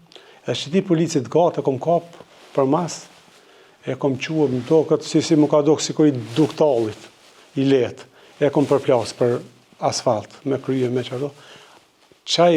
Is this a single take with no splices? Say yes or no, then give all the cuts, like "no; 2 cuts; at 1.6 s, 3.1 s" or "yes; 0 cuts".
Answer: yes; 0 cuts